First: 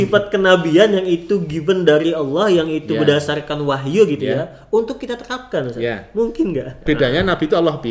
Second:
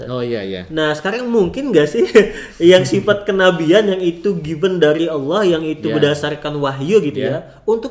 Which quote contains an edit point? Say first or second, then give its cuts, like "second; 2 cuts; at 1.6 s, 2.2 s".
first; 1 cut; at 6.8 s